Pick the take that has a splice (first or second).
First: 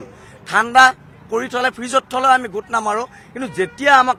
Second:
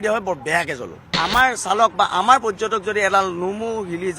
second